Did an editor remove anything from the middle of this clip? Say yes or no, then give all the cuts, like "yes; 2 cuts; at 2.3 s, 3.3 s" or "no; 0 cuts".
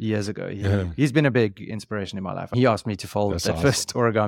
no; 0 cuts